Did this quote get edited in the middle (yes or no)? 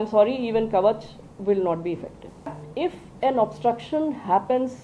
yes